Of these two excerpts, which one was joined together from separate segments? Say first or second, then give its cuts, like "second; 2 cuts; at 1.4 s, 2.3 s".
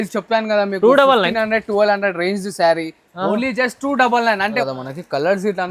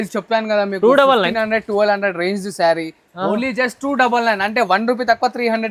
first; 1 cut; at 4.6 s